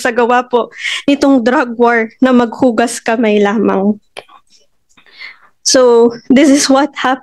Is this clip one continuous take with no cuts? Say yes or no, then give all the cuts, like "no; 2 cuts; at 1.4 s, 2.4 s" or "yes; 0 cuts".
yes; 0 cuts